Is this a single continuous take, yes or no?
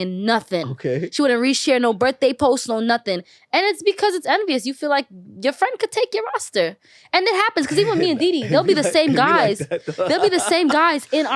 yes